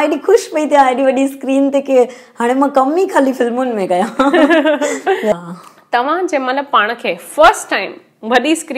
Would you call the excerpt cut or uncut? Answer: cut